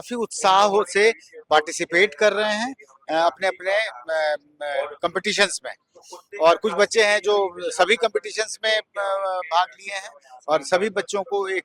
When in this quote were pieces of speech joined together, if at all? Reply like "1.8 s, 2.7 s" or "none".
none